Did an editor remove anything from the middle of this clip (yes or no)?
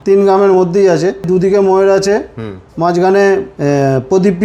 yes